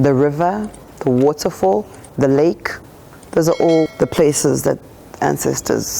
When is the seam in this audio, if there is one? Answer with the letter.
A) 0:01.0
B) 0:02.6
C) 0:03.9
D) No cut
C